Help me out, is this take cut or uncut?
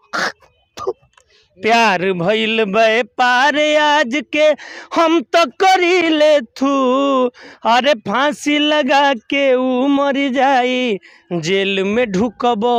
uncut